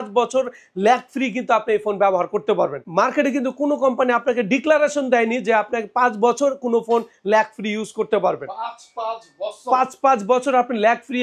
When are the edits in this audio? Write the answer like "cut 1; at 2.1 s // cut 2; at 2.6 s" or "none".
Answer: none